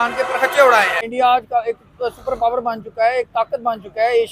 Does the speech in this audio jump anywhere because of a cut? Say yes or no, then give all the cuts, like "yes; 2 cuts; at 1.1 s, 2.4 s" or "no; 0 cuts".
yes; 1 cut; at 1.0 s